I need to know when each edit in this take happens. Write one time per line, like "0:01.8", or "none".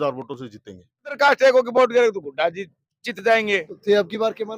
0:01.2